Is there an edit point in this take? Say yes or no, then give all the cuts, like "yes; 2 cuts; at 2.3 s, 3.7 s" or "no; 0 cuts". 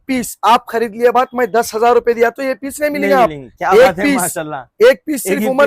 no; 0 cuts